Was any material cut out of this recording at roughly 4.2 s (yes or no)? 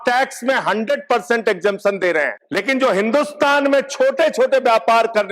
no